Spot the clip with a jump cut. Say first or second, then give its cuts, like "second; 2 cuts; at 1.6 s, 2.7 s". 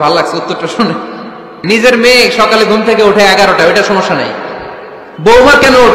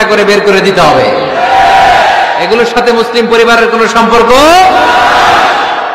first; 1 cut; at 1.6 s